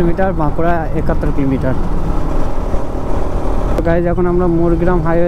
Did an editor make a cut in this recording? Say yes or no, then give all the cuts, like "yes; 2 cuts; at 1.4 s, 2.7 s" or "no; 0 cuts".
yes; 1 cut; at 3.8 s